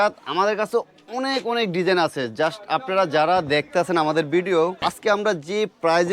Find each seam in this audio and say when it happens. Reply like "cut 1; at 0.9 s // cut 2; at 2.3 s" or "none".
cut 1; at 4.8 s